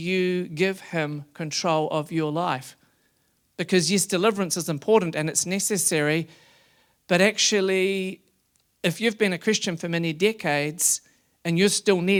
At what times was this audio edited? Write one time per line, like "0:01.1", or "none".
none